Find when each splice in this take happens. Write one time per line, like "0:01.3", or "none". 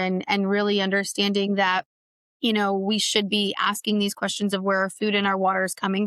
none